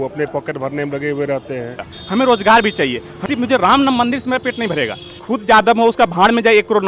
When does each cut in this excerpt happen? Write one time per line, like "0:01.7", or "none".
0:01.9
0:03.1
0:05.2

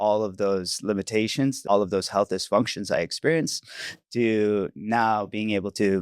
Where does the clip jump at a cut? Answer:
0:01.6

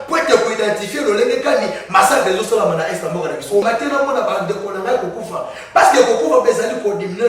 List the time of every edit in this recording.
0:03.6

